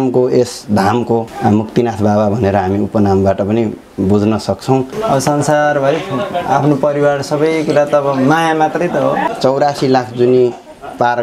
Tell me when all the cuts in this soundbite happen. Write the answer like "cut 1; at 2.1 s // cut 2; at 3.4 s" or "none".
cut 1; at 1.3 s // cut 2; at 4.9 s // cut 3; at 9.3 s

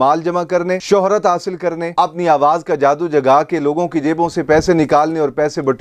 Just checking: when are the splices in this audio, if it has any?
none

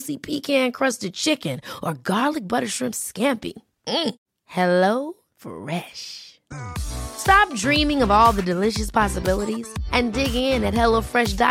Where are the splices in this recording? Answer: none

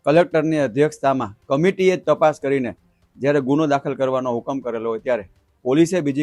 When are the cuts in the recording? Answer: none

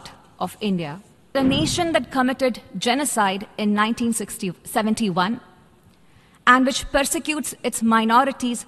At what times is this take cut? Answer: cut 1; at 1.3 s

